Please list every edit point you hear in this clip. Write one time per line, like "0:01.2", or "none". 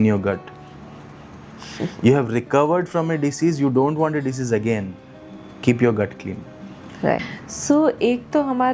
none